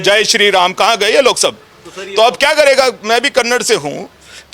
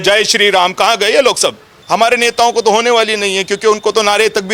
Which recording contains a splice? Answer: second; 1 cut; at 1.7 s

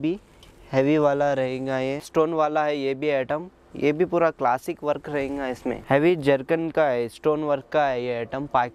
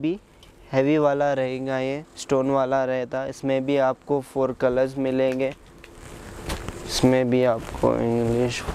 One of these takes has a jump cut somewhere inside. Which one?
first; 2 cuts; at 2.0 s, 5.8 s

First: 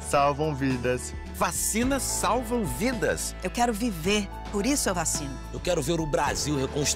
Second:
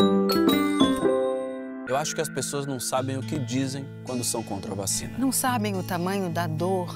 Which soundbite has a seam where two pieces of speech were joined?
second; 1 cut; at 1.8 s

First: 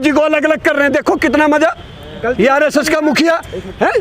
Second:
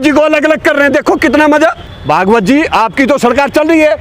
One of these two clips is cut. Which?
second; 1 cut; at 1.9 s

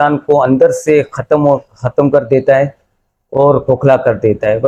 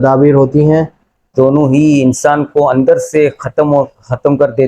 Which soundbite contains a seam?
second; 1 cut; at 1.3 s

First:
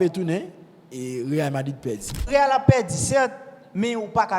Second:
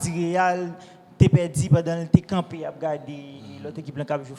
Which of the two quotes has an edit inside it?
first; 1 cut; at 2.2 s

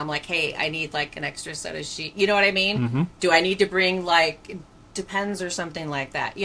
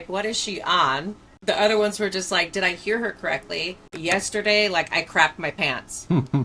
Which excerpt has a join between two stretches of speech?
second; 1 cut; at 3.8 s

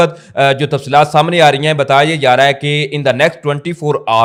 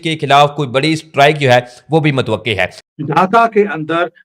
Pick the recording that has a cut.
second; 1 cut; at 2.9 s

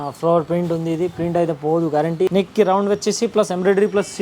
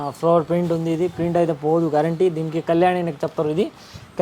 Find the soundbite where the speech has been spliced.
first; 1 cut; at 2.3 s

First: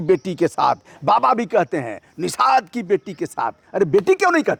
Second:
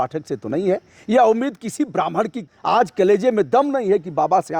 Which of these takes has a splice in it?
second; 1 cut; at 2.5 s

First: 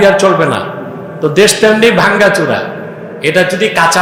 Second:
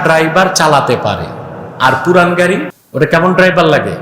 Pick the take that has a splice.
second; 1 cut; at 2.8 s

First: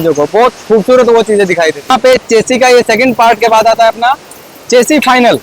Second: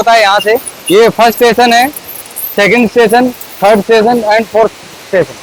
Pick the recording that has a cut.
first; 1 cut; at 1.9 s

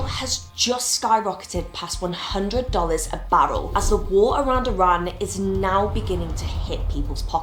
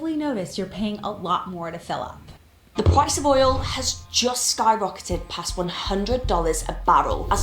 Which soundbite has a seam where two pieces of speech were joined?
second; 1 cut; at 2.3 s

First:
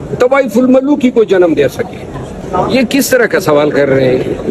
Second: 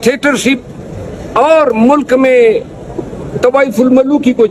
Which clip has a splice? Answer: first; 1 cut; at 2.4 s

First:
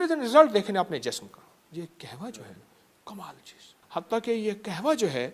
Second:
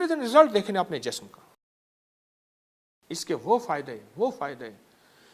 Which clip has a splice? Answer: first; 2 cuts; at 1.6 s, 3.7 s

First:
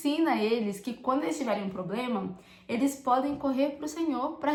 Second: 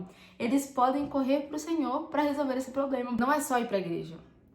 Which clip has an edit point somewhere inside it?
second; 1 cut; at 3.2 s

